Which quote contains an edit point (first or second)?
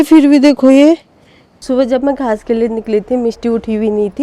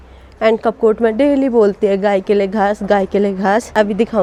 first